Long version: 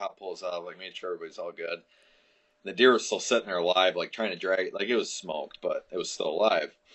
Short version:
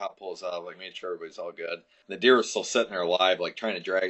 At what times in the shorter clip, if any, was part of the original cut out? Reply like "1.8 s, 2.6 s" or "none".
1.9 s